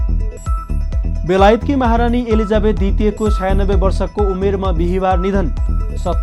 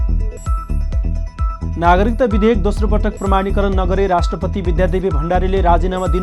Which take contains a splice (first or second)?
second